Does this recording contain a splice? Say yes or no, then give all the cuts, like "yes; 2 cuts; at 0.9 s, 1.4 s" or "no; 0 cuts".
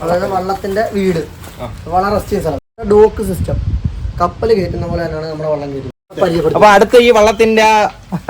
yes; 2 cuts; at 2.7 s, 6.1 s